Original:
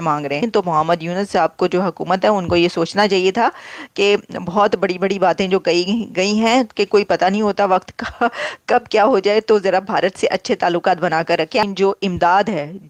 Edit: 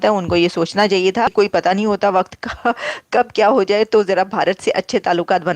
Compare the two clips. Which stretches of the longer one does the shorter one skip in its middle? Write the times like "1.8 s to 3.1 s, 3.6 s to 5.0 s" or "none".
3.5 s to 6.9 s